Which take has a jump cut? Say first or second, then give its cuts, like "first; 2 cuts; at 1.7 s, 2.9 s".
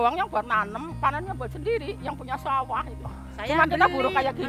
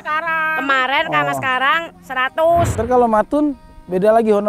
second; 1 cut; at 2.7 s